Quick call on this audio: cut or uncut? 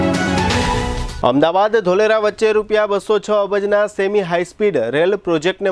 cut